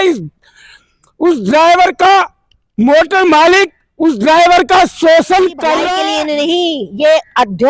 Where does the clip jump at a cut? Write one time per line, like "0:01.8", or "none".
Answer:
0:05.9